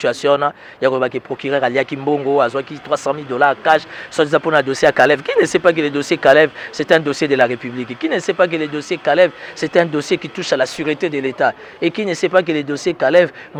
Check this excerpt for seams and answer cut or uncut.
uncut